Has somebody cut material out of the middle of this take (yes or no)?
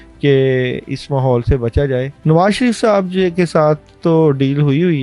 yes